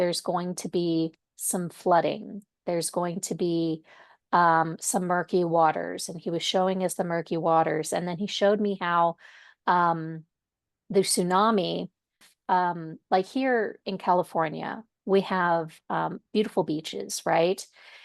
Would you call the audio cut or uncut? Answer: cut